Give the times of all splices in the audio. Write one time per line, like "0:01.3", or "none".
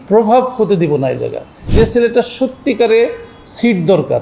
0:01.7